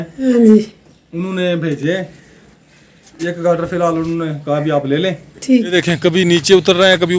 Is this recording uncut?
no; 1 cut; at 5.7 s

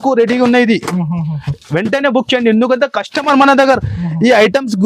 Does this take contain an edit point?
no; 0 cuts

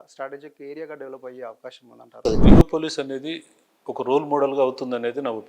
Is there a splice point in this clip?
yes; 2 cuts; at 2.1 s, 2.7 s

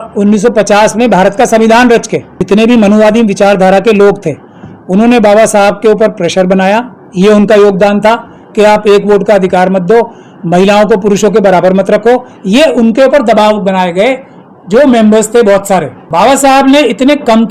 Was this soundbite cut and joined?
yes; 2 cuts; at 2.3 s, 16.0 s

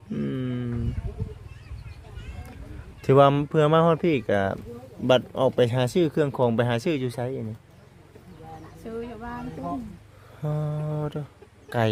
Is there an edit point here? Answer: no; 0 cuts

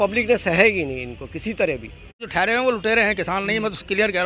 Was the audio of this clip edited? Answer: yes; 1 cut; at 2.3 s

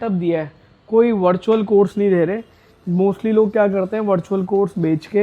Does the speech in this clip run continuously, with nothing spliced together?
yes; 0 cuts

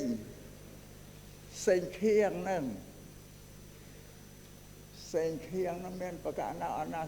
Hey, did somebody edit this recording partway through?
no; 0 cuts

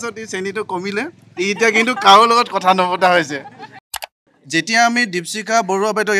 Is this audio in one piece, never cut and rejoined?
no; 1 cut; at 3.8 s

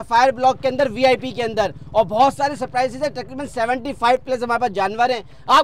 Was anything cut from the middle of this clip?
no; 0 cuts

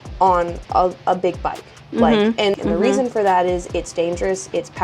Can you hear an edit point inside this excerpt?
yes; 1 cut; at 2.5 s

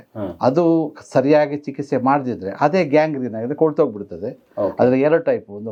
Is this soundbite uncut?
yes; 0 cuts

